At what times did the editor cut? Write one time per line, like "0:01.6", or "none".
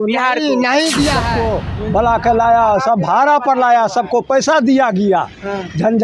0:01.3